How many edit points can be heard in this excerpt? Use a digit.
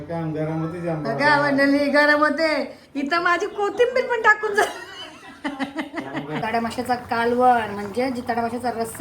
1